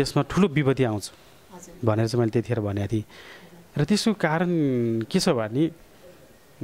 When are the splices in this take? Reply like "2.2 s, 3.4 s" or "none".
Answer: none